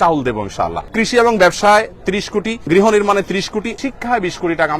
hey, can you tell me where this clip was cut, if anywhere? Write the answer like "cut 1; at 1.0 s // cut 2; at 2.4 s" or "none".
cut 1; at 0.9 s // cut 2; at 2.7 s // cut 3; at 3.7 s